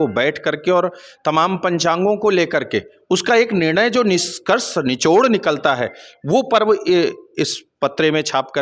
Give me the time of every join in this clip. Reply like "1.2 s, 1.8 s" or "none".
none